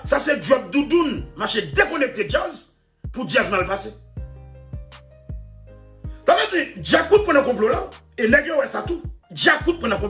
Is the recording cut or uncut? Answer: uncut